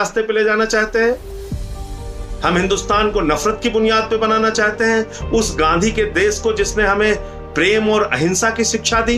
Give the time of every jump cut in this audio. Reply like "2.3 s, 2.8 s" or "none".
none